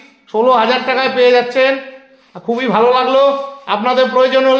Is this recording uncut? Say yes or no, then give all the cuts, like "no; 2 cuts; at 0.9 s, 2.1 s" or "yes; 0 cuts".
yes; 0 cuts